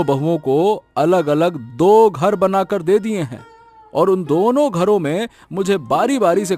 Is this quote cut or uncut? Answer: uncut